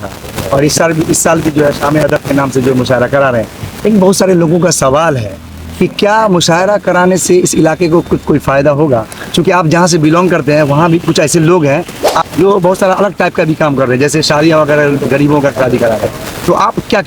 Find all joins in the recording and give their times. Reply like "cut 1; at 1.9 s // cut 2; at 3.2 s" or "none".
cut 1; at 12.2 s